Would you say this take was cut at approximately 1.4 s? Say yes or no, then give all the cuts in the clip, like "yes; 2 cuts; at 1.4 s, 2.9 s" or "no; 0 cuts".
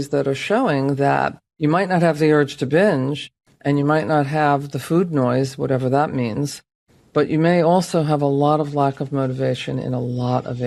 yes; 1 cut; at 1.4 s